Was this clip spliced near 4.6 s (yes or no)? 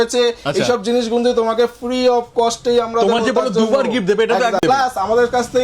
yes